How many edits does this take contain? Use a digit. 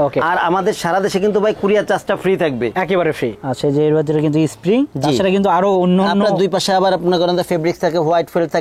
1